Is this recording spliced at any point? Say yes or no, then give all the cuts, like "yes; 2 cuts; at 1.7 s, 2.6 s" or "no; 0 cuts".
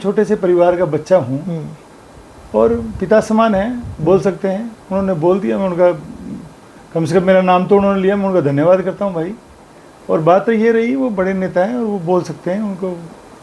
no; 0 cuts